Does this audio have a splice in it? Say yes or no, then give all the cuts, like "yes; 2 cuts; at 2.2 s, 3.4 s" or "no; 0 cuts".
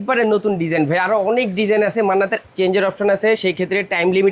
yes; 1 cut; at 2.4 s